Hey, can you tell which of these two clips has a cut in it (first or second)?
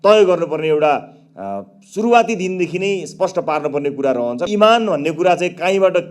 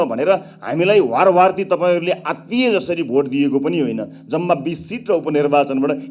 first